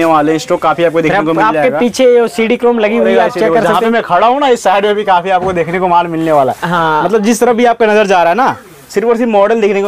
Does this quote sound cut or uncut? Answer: uncut